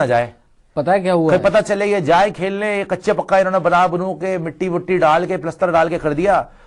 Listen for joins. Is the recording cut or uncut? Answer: uncut